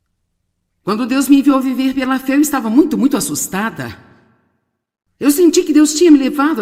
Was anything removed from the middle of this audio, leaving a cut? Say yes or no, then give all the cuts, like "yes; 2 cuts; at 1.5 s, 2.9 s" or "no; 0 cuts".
yes; 1 cut; at 2.0 s